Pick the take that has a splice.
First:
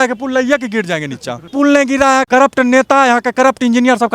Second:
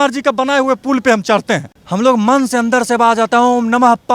first; 2 cuts; at 1.4 s, 2.2 s

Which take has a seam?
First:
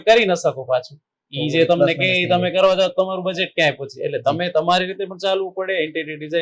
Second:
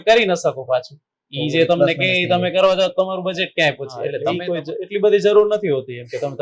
second; 1 cut; at 4.3 s

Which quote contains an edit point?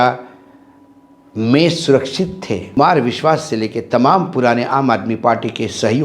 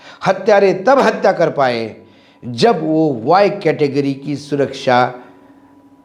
first; 1 cut; at 2.8 s

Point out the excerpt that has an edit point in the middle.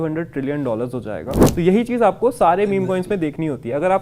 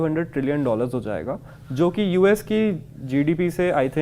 first; 1 cut; at 1.4 s

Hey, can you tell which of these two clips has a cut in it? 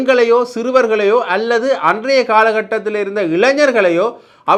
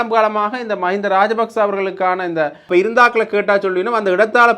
second; 1 cut; at 2.7 s

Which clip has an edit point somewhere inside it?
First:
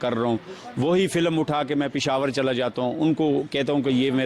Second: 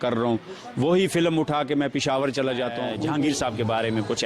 second; 1 cut; at 2.9 s

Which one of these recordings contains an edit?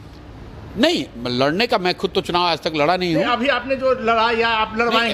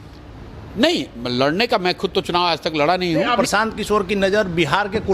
second; 1 cut; at 3.4 s

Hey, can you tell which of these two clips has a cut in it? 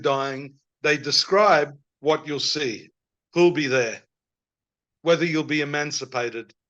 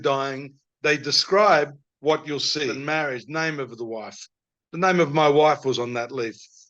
second; 1 cut; at 2.8 s

